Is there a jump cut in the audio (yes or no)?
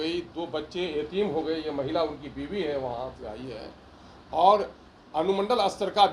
no